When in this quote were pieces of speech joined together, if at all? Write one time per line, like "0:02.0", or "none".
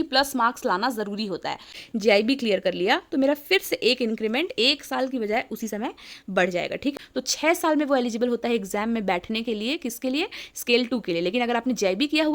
0:01.7
0:07.0